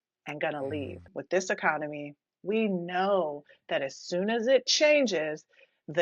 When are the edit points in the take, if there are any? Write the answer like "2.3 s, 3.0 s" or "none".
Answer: 1.1 s